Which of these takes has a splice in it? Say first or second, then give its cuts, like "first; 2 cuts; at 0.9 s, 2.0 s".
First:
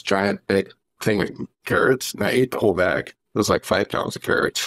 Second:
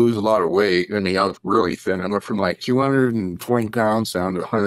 first; 2 cuts; at 1.5 s, 3.2 s